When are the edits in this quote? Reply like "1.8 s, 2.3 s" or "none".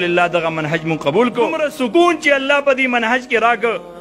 2.2 s

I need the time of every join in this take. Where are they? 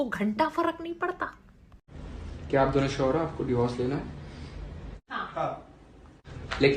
1.7 s

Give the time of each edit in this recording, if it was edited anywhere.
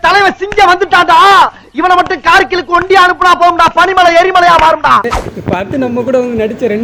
5.0 s

